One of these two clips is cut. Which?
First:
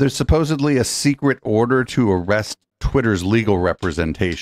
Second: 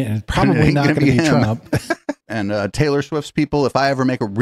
second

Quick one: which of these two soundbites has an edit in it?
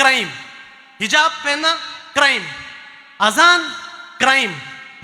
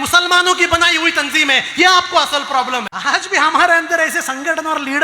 second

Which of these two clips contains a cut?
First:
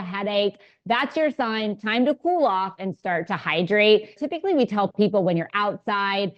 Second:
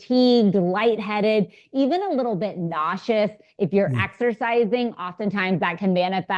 first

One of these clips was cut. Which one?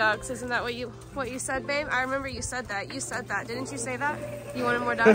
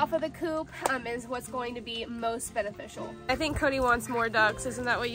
second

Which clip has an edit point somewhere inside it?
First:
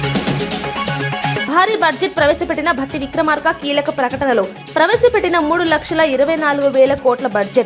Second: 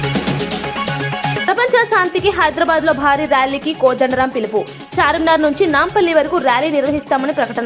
second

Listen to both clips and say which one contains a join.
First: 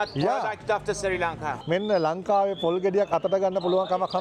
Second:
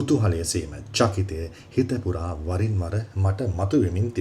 first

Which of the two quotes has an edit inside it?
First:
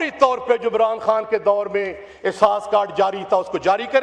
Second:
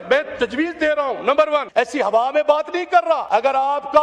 second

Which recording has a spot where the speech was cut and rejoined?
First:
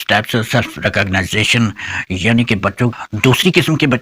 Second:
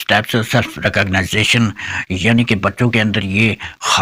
first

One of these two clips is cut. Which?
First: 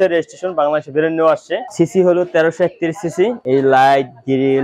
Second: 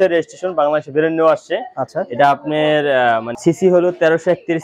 first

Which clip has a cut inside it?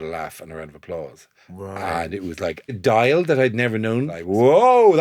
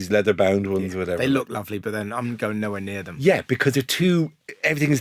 first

